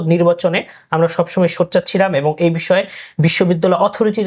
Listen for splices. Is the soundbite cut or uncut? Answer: uncut